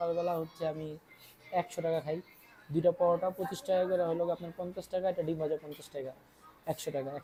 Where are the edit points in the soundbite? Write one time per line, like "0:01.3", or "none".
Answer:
none